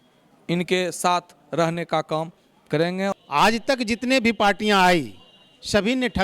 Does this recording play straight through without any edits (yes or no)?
no